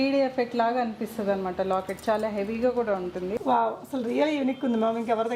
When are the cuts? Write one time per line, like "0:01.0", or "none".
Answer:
0:03.4